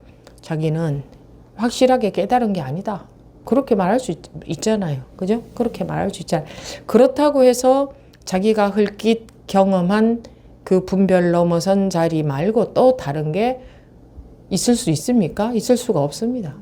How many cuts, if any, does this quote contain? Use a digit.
1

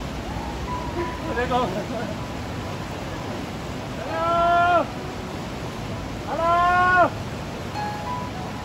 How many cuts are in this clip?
0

